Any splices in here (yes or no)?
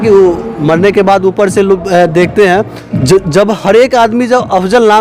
yes